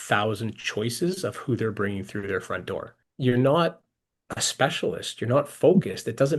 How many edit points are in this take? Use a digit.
1